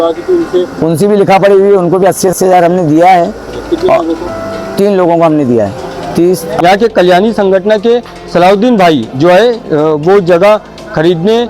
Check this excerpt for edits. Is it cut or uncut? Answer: cut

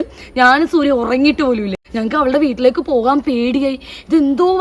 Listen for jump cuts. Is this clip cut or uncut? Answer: cut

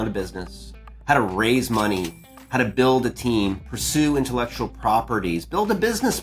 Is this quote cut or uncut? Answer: uncut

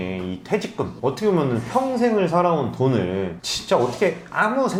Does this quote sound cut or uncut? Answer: uncut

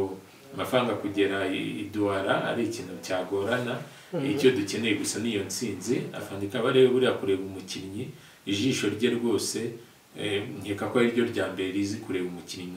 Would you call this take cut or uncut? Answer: cut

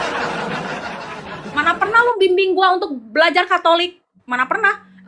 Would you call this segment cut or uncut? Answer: cut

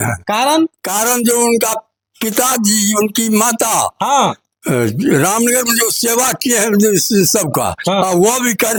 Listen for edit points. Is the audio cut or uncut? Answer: uncut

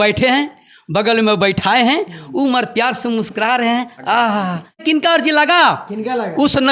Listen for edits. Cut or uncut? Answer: cut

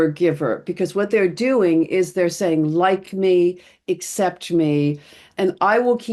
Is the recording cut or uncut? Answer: uncut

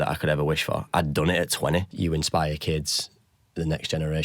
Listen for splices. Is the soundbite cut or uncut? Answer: cut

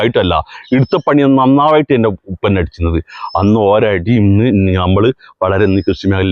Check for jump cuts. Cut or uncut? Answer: uncut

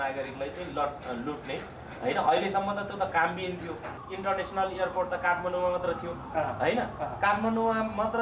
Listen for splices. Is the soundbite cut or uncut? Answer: cut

